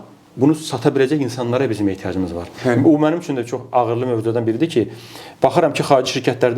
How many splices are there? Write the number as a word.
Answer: one